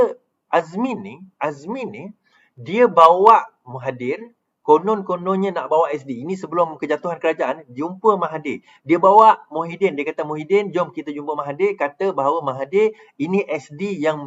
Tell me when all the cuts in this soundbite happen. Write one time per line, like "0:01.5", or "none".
none